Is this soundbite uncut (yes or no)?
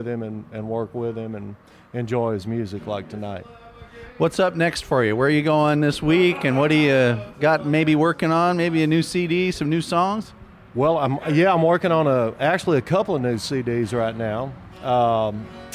yes